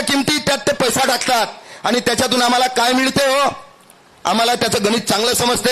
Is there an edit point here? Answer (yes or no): no